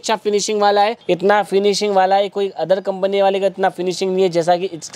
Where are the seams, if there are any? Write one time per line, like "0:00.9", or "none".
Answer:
0:01.0